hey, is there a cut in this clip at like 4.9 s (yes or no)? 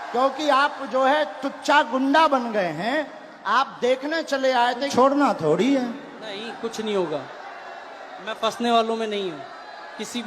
yes